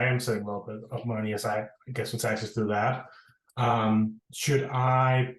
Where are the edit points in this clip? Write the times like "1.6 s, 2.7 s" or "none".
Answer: 4.3 s